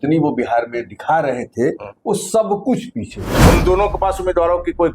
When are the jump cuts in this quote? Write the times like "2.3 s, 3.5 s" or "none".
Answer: 3.5 s